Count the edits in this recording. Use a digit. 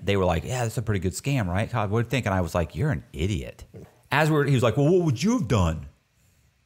1